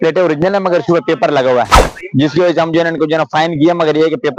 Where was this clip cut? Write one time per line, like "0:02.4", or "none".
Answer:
none